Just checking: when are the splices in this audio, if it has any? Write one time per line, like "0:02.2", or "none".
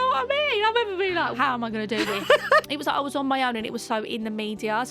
0:01.4
0:02.7

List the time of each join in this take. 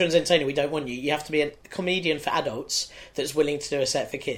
0:01.6

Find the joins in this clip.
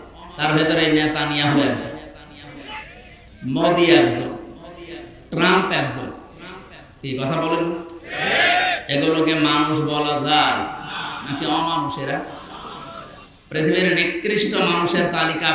none

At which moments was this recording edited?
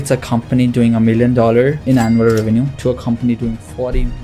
0:01.8

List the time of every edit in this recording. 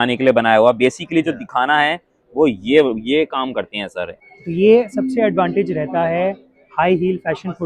0:04.3

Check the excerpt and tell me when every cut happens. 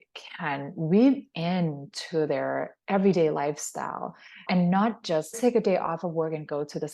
0:05.4

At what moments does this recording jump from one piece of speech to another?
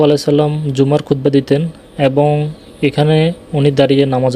none

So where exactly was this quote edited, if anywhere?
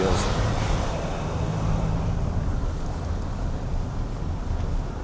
none

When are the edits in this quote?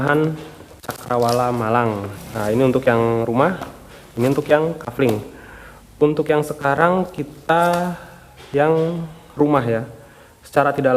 0:02.1

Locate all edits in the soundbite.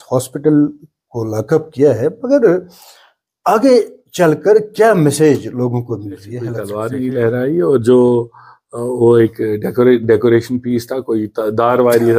0:06.7

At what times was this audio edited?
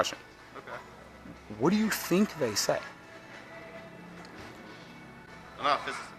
none

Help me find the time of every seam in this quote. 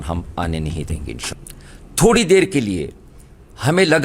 0:01.2

